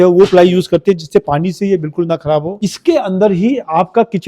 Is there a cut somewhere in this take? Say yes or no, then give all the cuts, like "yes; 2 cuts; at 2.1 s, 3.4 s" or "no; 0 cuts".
yes; 1 cut; at 2.5 s